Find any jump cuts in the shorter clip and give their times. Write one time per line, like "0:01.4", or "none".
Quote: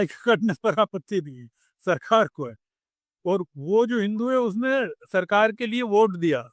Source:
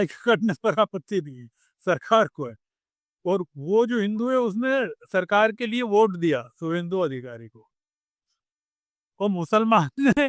none